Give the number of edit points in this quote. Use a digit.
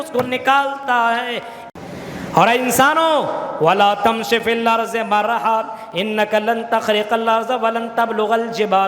1